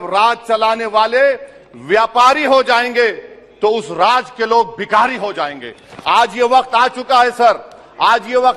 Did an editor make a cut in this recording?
no; 0 cuts

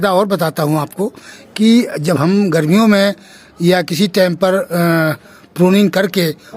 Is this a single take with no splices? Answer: yes; 0 cuts

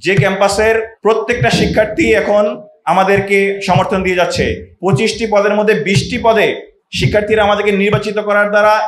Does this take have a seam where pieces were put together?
yes; 2 cuts; at 0.9 s, 4.7 s

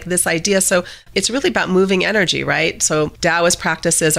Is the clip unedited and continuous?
no; 2 cuts; at 1.1 s, 3.1 s

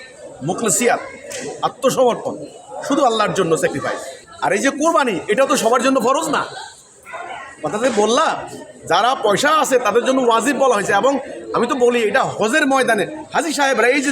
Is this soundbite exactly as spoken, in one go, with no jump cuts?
no; 1 cut; at 4.1 s

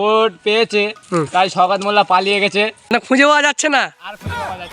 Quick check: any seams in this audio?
yes; 2 cuts; at 1.0 s, 2.9 s

